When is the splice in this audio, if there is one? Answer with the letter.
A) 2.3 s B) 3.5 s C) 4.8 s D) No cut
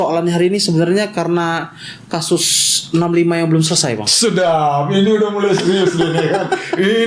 D